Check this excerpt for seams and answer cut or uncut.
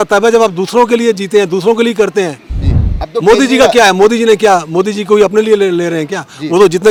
uncut